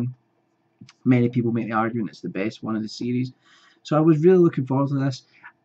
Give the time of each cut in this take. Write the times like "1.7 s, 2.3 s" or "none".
2.9 s

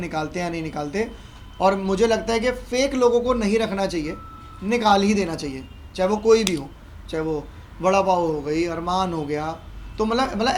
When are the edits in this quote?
none

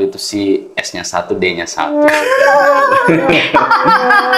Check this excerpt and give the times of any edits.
none

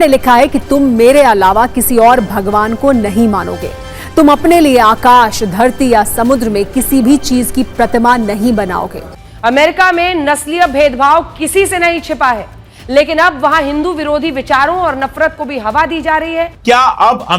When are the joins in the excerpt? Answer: 9.0 s, 16.5 s

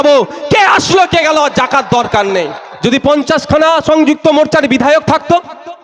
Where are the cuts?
2.6 s

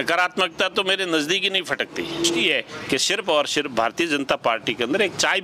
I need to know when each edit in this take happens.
2.4 s

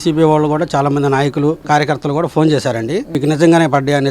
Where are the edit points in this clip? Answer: 1.6 s, 3.1 s

